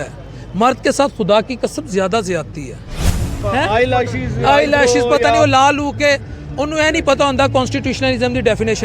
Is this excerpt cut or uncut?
cut